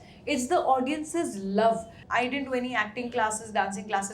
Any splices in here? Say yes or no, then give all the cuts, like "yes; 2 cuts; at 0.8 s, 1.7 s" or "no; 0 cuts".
yes; 1 cut; at 2.0 s